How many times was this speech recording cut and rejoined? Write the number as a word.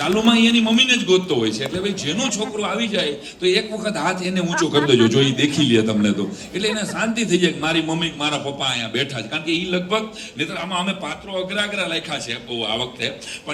zero